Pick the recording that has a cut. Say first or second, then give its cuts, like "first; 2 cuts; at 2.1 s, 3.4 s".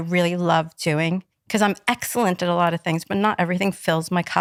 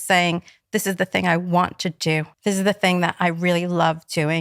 second; 1 cut; at 2.3 s